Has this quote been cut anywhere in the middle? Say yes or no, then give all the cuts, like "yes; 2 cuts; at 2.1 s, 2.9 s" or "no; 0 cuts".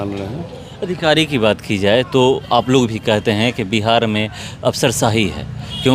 no; 0 cuts